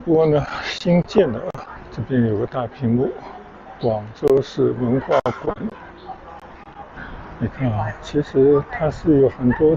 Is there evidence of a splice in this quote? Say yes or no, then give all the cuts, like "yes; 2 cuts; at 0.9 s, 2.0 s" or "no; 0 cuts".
yes; 1 cut; at 7.2 s